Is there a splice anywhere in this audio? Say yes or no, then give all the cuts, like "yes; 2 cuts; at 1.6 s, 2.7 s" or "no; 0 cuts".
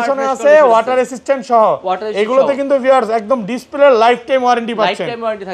no; 0 cuts